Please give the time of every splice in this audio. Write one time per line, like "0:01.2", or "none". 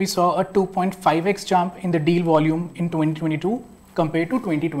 none